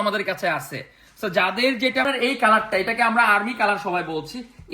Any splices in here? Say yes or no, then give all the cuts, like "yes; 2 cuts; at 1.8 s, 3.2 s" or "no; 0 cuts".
yes; 1 cut; at 2.1 s